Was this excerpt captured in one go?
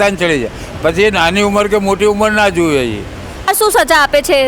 no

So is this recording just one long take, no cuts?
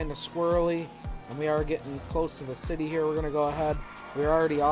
yes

